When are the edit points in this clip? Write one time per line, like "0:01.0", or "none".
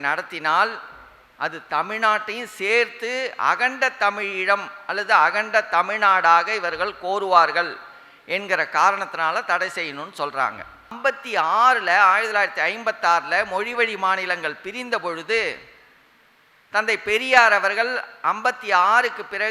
0:11.0